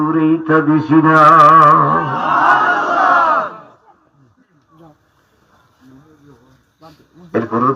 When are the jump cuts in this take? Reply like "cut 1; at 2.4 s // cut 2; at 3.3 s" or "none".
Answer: none